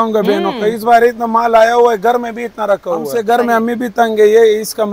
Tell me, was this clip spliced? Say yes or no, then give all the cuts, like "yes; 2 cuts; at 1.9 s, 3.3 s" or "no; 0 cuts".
yes; 1 cut; at 3.1 s